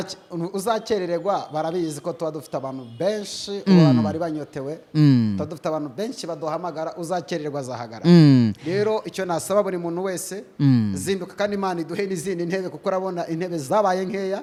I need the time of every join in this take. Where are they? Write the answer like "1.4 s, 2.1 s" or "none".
none